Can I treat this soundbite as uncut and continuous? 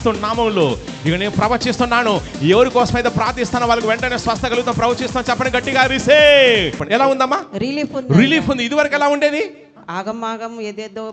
no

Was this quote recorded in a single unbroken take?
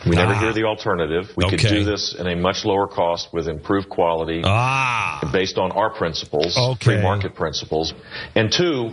no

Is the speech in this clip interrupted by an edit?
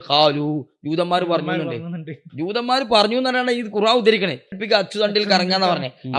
yes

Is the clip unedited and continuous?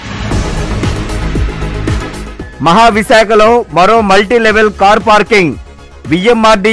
yes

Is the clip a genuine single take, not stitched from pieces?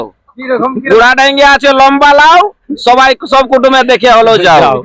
yes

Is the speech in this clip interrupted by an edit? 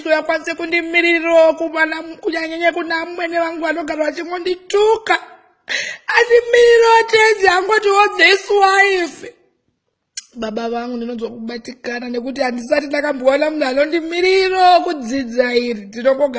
yes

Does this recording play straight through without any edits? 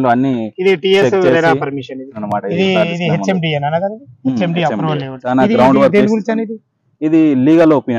no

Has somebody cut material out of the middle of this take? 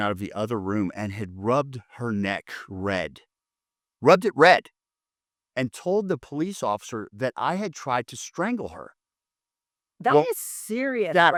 no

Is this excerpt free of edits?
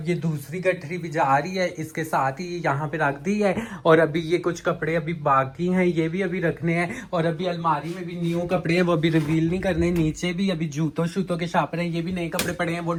yes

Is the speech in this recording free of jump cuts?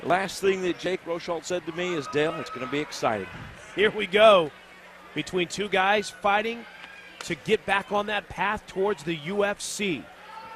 no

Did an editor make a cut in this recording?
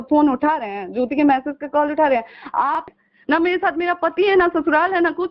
yes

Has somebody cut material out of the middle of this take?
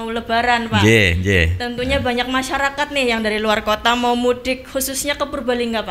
no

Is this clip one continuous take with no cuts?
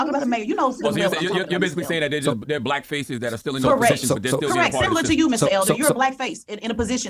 yes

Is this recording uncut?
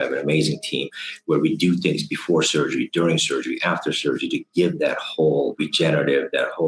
no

